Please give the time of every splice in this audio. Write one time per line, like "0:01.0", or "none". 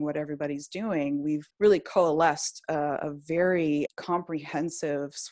0:01.5
0:03.9